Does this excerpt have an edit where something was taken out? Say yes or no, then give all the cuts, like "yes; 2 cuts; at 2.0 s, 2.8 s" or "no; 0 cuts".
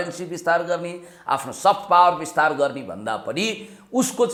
no; 0 cuts